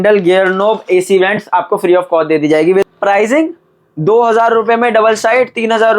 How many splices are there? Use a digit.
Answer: 1